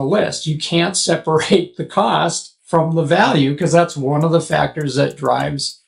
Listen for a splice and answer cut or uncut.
uncut